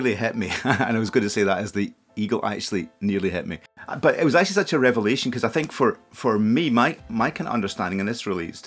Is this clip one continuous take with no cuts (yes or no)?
no